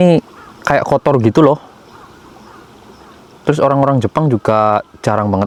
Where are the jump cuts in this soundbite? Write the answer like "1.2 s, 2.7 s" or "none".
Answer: none